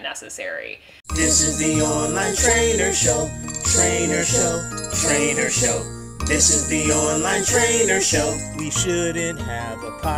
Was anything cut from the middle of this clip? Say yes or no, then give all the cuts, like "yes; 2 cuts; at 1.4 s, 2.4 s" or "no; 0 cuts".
yes; 1 cut; at 0.9 s